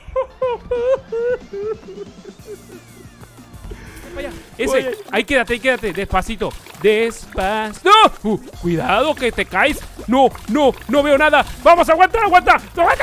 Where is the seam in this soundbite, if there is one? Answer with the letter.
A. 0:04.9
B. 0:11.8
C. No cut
A